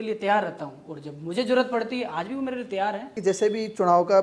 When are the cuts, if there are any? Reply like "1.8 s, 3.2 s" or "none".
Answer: 3.1 s